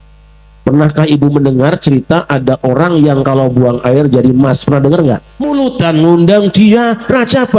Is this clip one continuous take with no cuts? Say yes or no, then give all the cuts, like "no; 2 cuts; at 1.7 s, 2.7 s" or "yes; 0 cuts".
no; 1 cut; at 5.4 s